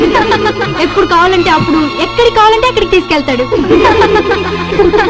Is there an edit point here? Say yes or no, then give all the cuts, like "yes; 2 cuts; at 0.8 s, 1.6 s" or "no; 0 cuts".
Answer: no; 0 cuts